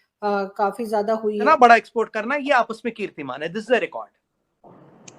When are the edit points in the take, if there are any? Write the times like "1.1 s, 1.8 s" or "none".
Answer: 1.5 s